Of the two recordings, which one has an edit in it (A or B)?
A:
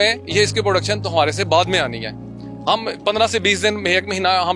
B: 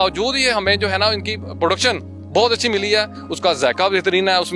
B